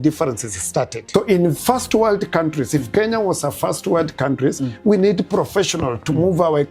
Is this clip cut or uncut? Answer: cut